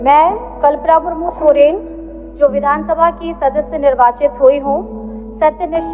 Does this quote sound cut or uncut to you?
uncut